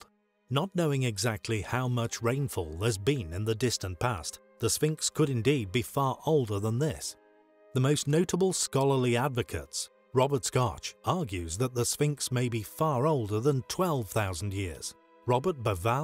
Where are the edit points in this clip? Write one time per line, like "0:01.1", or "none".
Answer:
0:10.3

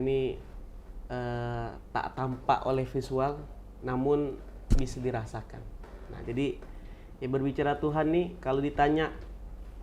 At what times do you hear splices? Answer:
none

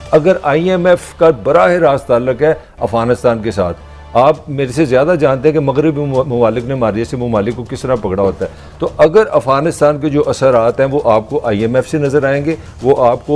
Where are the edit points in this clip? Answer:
none

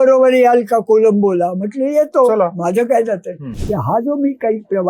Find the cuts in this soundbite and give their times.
0:03.5

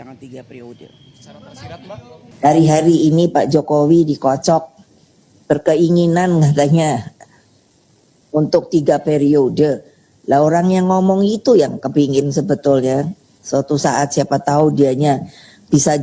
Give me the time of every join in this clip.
0:02.4

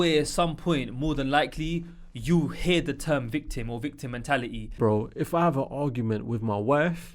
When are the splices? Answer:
0:04.8

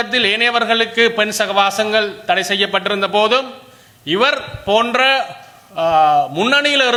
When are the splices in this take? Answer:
none

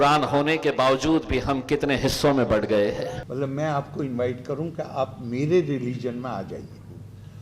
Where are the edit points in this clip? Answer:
0:03.2

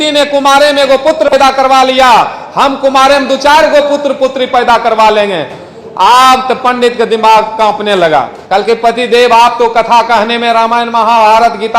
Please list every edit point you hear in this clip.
0:01.3
0:08.4

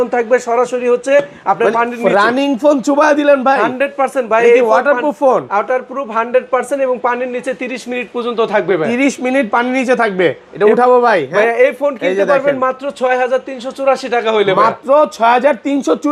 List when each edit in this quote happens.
none

